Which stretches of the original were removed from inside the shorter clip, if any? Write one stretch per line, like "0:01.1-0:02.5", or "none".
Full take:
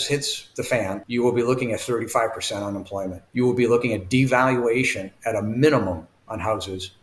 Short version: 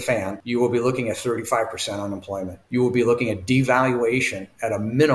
none